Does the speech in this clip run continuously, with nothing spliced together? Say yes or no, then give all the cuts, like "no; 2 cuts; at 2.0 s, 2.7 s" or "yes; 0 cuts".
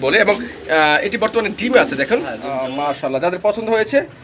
no; 1 cut; at 2.7 s